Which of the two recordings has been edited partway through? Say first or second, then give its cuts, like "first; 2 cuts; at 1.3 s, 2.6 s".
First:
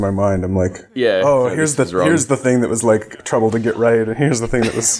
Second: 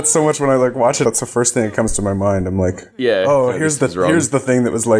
second; 1 cut; at 1.0 s